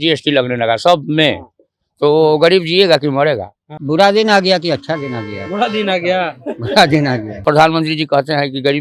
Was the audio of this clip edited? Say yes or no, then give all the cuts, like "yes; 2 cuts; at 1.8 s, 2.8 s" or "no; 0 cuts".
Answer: yes; 2 cuts; at 3.7 s, 7.4 s